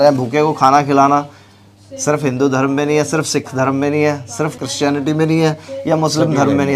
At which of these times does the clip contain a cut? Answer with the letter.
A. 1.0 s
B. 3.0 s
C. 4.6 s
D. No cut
C